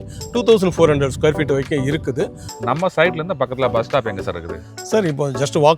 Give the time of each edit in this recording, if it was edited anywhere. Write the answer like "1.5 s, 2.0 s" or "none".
2.4 s